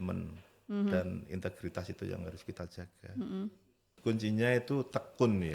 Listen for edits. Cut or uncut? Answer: cut